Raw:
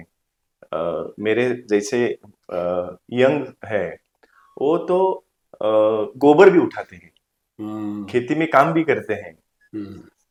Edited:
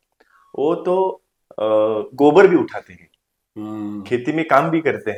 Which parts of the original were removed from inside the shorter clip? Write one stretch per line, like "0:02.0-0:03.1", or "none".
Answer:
none